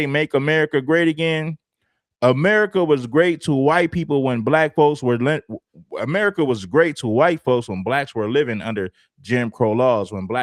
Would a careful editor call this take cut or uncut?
uncut